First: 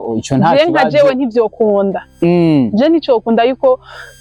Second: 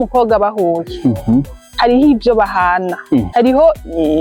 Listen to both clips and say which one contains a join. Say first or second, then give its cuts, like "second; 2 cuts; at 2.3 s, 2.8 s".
second; 2 cuts; at 1.6 s, 3.3 s